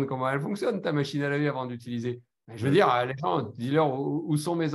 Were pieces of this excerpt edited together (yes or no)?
no